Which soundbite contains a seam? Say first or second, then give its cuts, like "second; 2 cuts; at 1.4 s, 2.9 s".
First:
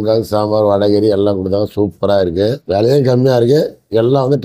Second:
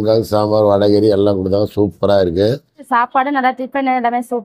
second; 1 cut; at 2.7 s